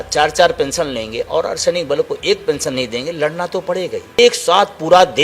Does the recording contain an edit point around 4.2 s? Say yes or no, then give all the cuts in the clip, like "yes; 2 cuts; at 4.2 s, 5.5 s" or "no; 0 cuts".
yes; 1 cut; at 4.2 s